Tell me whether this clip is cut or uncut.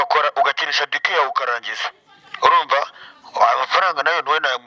uncut